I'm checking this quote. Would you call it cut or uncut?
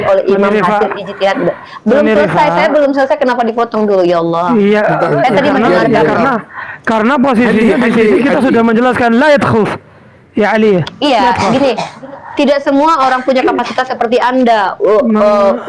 uncut